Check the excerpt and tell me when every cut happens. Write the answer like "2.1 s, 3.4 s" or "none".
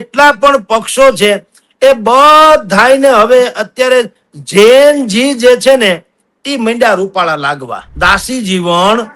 7.8 s